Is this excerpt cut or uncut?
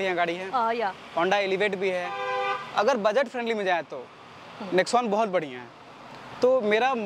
uncut